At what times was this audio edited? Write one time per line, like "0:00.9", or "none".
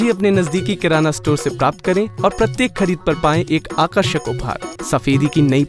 0:04.7